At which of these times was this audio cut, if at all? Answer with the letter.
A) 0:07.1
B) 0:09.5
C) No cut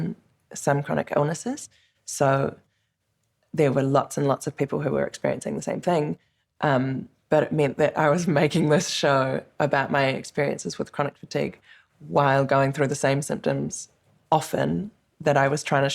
A